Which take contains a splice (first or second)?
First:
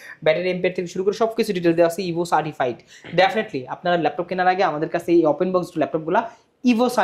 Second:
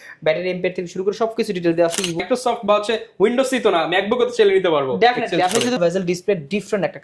second